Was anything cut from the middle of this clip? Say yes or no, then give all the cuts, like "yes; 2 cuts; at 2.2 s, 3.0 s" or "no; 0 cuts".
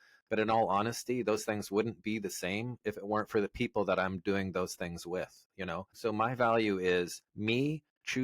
yes; 2 cuts; at 5.9 s, 7.2 s